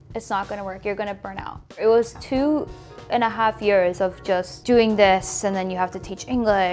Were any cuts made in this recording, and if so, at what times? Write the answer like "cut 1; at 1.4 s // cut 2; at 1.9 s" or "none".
cut 1; at 1.8 s // cut 2; at 4.5 s